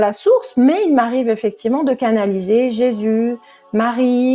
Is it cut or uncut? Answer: uncut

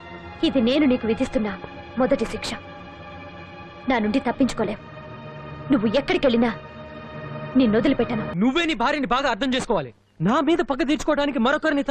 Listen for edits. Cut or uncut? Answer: cut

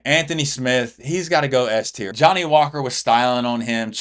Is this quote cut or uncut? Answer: cut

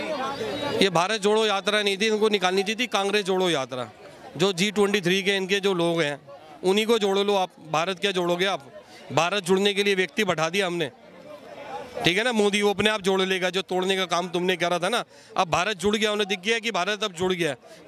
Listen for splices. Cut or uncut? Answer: uncut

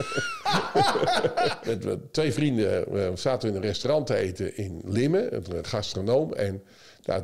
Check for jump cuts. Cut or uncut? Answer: cut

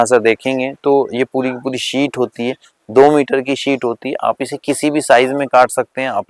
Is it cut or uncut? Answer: uncut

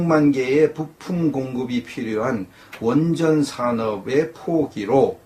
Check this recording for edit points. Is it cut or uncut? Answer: cut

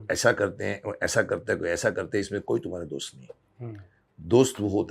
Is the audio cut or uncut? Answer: uncut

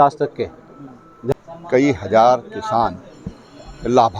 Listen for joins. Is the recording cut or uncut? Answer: cut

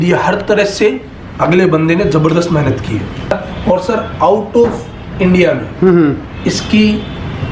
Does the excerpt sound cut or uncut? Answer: cut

